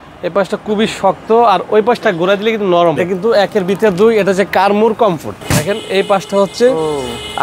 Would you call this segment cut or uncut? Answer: cut